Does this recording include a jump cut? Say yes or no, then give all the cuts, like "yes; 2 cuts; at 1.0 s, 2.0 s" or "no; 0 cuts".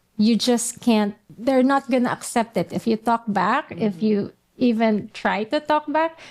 yes; 1 cut; at 1.2 s